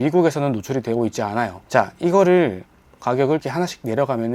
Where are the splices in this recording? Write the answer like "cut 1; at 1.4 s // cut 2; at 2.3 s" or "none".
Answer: cut 1; at 1.6 s

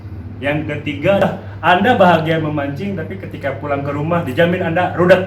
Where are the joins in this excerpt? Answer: cut 1; at 1.2 s

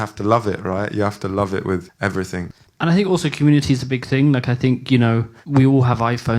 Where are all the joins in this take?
cut 1; at 2.2 s // cut 2; at 5.3 s

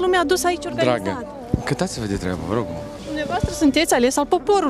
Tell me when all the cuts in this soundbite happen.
cut 1; at 3.0 s

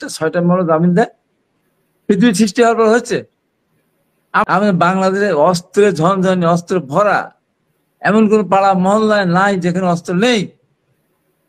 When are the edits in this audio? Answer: cut 1; at 4.4 s

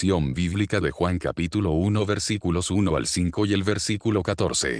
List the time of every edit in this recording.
cut 1; at 1.0 s

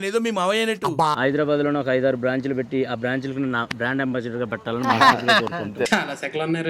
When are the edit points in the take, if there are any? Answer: cut 1; at 1.2 s

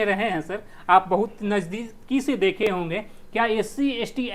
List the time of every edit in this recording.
none

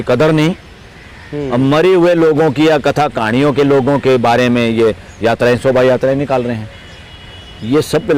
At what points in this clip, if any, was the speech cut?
none

